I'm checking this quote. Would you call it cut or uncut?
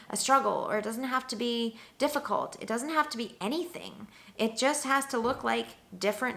uncut